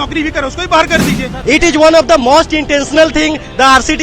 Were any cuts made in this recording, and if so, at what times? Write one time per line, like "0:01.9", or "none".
0:01.3